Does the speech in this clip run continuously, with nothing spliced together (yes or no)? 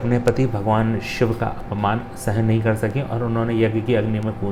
yes